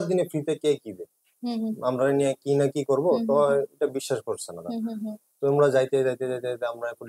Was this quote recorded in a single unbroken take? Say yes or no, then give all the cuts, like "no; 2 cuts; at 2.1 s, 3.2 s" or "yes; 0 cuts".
yes; 0 cuts